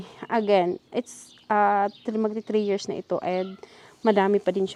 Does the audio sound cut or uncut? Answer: uncut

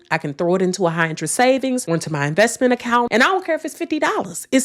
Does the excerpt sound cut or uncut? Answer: uncut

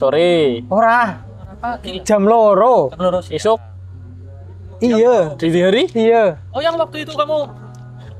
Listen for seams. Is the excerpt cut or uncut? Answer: uncut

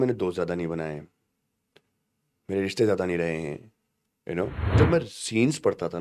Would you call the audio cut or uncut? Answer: cut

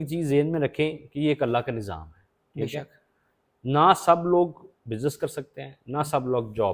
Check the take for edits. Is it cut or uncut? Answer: uncut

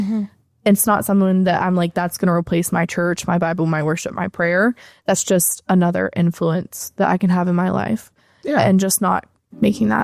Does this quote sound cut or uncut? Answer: uncut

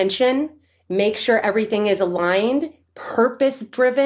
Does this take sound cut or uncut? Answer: uncut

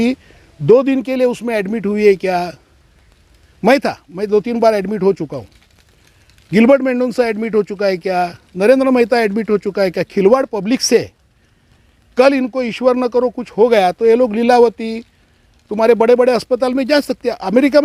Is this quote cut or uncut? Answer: uncut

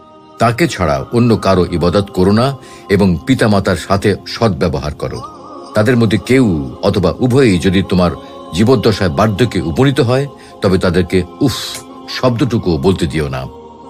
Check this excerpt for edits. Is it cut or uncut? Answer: uncut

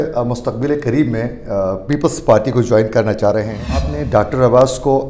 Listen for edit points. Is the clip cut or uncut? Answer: cut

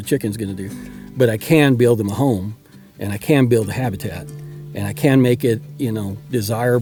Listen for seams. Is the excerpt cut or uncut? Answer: uncut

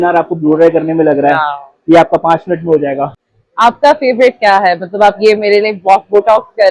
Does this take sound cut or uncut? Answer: cut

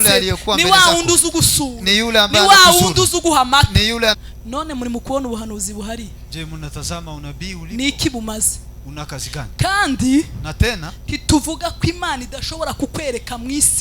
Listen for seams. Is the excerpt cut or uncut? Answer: cut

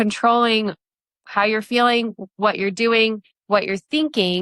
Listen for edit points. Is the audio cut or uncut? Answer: cut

